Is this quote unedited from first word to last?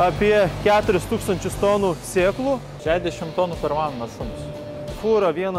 no; 2 cuts; at 2.7 s, 4.7 s

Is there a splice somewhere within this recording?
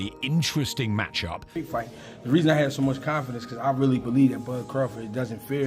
yes; 1 cut; at 1.6 s

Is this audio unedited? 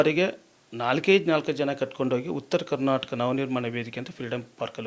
yes; 0 cuts

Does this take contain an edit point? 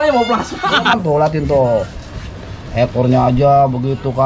yes; 1 cut; at 1.0 s

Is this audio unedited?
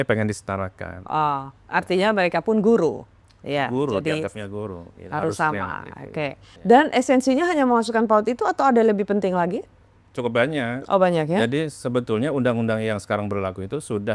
yes; 0 cuts

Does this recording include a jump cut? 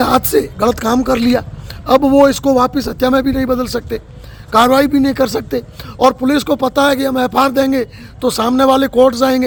no; 0 cuts

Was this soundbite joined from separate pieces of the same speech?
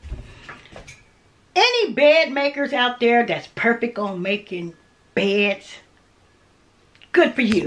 no; 0 cuts

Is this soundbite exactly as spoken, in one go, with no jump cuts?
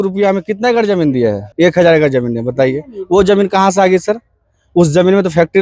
no; 1 cut; at 1.4 s

